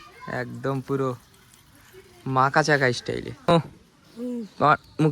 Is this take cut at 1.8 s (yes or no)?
no